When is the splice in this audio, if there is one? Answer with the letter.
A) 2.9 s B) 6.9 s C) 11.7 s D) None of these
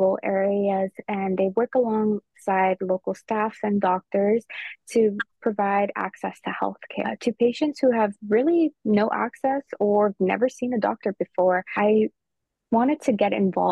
C